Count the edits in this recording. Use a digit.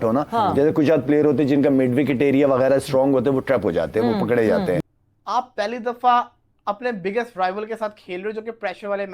1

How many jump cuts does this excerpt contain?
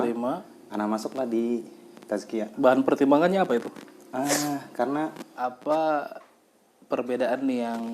1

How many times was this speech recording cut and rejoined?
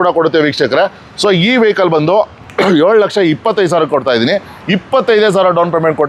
0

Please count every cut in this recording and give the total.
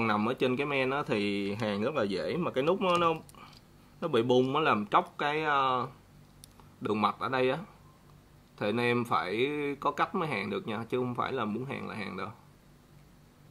0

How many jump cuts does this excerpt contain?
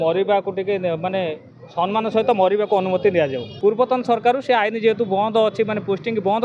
1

